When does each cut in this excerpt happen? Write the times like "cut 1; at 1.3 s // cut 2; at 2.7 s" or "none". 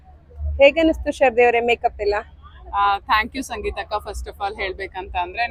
none

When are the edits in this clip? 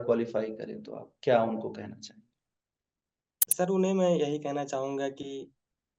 none

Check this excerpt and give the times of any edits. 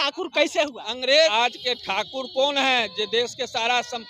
cut 1; at 1.3 s

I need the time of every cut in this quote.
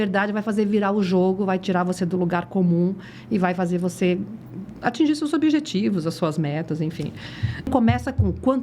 cut 1; at 7.7 s

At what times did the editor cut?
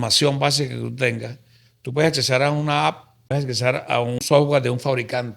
cut 1; at 3.3 s // cut 2; at 4.2 s

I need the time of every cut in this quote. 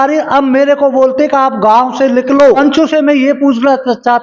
cut 1; at 2.6 s

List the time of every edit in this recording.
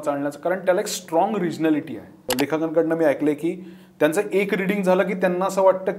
cut 1; at 2.2 s

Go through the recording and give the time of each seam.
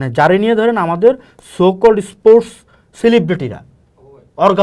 none

